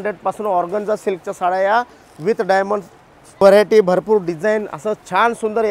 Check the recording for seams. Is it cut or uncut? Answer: cut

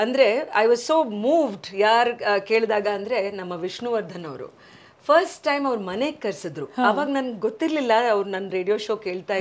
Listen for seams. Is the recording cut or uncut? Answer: uncut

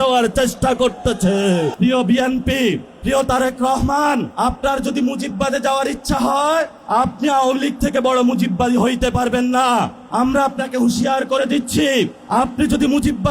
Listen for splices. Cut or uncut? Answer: cut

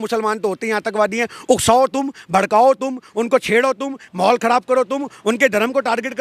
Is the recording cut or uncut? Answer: uncut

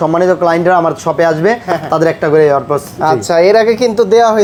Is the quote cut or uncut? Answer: uncut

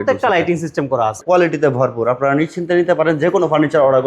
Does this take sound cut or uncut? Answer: cut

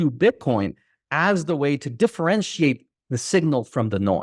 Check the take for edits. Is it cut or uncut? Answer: uncut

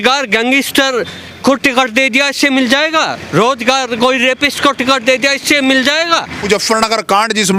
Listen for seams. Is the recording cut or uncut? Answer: cut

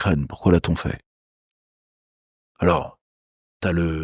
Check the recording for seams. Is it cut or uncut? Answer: uncut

